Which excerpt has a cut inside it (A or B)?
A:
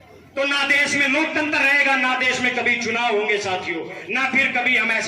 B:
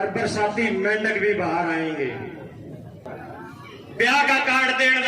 B